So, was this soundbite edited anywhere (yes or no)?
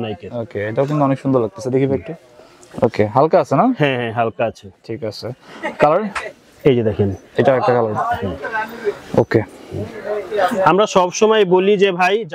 no